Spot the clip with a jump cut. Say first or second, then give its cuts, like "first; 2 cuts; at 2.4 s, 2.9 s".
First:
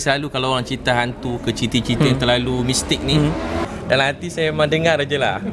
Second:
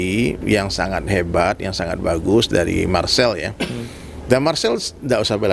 first; 1 cut; at 3.7 s